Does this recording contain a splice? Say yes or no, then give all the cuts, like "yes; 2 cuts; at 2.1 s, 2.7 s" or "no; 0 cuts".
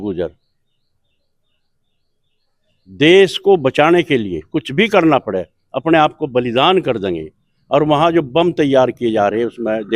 no; 0 cuts